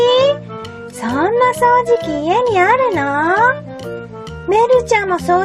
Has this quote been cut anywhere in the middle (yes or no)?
yes